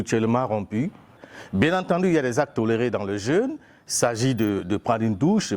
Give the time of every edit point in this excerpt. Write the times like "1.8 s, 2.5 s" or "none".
1.2 s